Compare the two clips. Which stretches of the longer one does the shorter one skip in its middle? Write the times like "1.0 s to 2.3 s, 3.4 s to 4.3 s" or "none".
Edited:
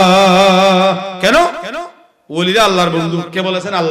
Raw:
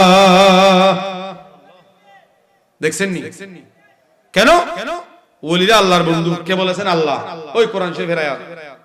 1.1 s to 4.3 s